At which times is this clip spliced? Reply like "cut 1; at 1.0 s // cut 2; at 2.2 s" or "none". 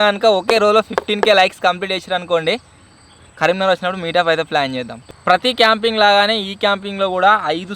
cut 1; at 5.0 s